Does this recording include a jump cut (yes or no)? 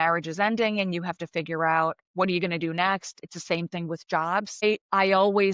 yes